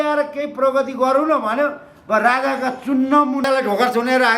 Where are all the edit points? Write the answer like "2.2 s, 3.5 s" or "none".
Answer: 3.5 s